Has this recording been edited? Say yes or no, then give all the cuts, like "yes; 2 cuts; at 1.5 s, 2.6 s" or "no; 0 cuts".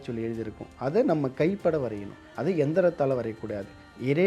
no; 0 cuts